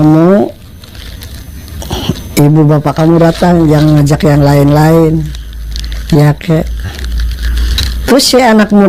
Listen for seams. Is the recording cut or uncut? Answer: uncut